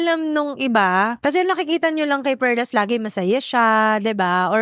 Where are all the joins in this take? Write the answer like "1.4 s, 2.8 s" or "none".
1.1 s